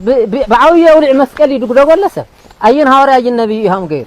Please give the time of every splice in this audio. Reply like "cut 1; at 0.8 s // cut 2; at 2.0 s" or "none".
none